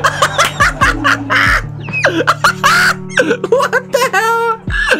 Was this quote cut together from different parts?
no; 0 cuts

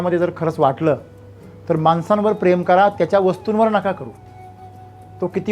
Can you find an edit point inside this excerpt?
no; 0 cuts

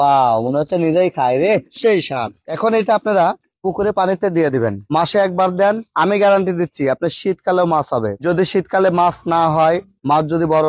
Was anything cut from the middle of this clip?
yes; 1 cut; at 4.8 s

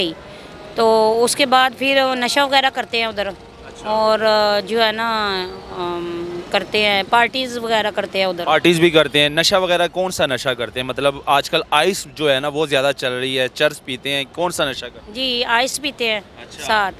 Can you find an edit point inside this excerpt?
no; 0 cuts

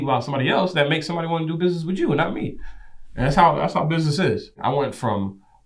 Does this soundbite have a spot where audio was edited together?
yes; 1 cut; at 4.5 s

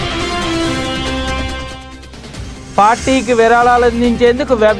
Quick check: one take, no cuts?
yes; 0 cuts

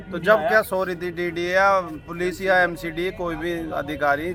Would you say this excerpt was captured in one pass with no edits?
yes; 0 cuts

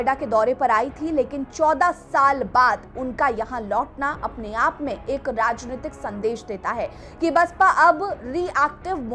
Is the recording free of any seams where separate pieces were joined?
yes; 0 cuts

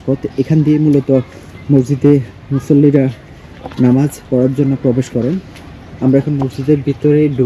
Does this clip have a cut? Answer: no; 0 cuts

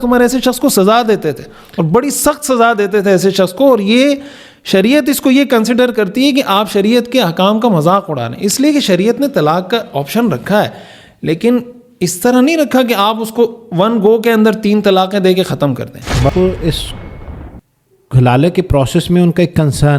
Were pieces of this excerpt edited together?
yes; 1 cut; at 16.3 s

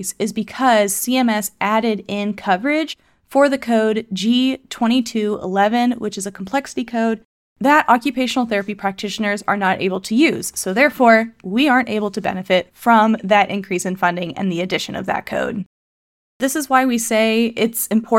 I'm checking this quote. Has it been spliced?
yes; 1 cut; at 16.4 s

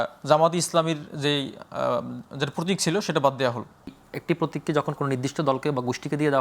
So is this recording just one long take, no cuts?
no; 1 cut; at 4.1 s

